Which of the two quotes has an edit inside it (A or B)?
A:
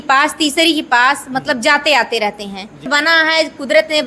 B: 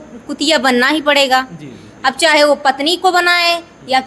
A